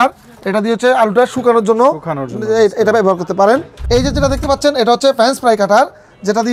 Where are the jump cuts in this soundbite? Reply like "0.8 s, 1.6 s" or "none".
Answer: 3.7 s